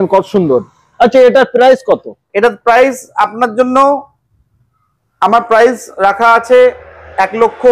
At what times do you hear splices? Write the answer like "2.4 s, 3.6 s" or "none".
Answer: none